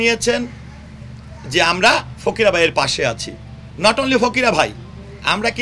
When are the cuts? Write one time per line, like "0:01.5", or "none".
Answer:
none